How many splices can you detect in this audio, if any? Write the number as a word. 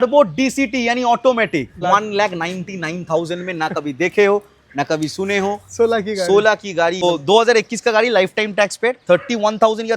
two